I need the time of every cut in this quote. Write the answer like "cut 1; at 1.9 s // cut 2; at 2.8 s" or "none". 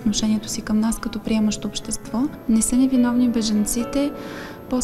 cut 1; at 2.4 s